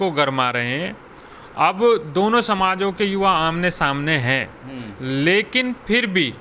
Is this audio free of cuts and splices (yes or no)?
yes